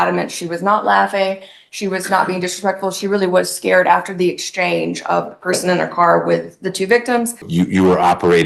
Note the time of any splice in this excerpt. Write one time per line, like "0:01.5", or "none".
0:07.4